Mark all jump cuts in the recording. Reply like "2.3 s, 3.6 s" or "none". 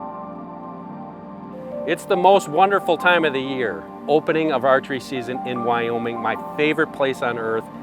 1.9 s, 3.9 s